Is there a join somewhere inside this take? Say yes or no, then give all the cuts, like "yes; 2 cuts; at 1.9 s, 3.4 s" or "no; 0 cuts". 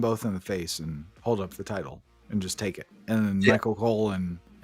no; 0 cuts